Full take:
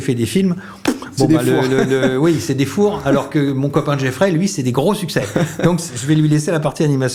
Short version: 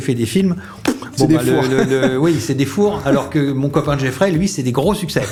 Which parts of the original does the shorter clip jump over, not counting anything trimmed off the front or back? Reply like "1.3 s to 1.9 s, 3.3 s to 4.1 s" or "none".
none